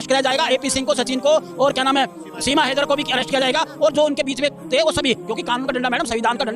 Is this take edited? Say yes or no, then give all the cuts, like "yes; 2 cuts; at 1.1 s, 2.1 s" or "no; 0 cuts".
no; 0 cuts